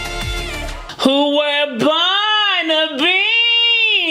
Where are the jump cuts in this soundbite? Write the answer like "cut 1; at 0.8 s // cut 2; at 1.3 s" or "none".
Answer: cut 1; at 0.9 s